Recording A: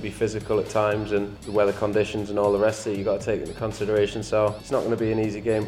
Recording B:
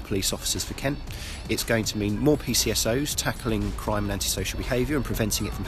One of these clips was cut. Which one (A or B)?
A